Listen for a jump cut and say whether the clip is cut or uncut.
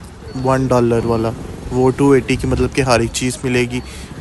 uncut